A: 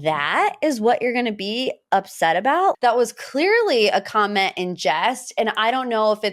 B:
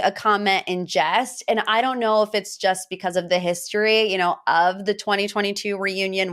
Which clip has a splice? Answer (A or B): A